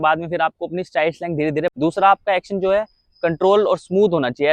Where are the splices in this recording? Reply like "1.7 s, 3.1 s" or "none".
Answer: 1.7 s